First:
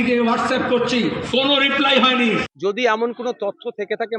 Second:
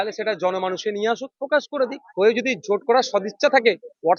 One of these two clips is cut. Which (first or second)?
first